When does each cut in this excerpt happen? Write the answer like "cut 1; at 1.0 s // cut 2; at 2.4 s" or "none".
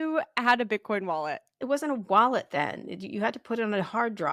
cut 1; at 1.6 s

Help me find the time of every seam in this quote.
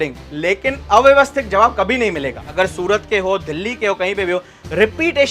cut 1; at 2.3 s

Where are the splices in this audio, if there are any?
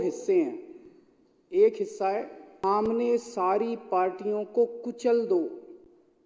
cut 1; at 2.4 s

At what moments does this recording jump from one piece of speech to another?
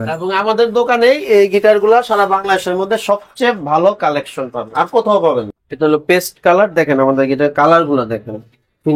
cut 1; at 5.6 s

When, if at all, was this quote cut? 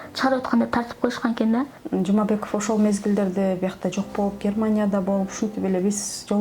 cut 1; at 1.8 s

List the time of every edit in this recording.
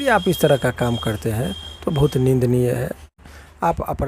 cut 1; at 3.0 s

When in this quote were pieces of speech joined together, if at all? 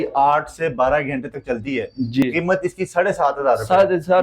cut 1; at 2.2 s

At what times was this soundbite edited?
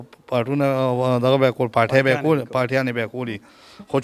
none

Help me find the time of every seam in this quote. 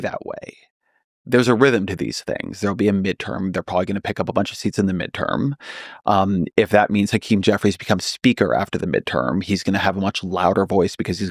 none

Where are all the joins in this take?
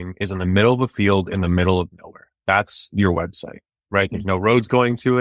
none

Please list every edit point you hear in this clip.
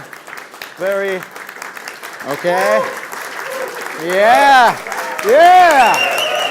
cut 1; at 5.4 s

